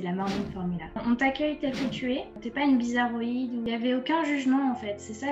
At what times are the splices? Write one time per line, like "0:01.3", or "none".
0:01.0
0:02.4
0:03.7